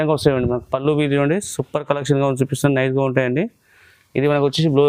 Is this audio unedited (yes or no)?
yes